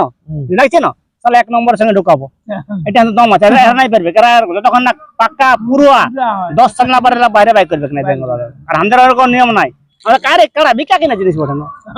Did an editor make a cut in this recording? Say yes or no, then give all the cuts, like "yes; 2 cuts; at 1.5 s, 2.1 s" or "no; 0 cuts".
no; 0 cuts